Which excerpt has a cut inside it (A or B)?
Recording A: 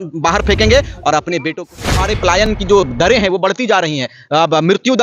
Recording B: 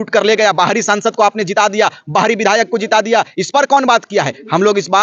A